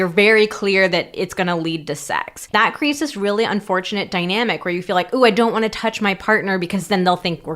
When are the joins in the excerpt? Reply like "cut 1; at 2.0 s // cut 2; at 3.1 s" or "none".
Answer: cut 1; at 2.5 s